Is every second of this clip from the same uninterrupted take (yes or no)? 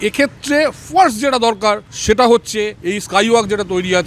no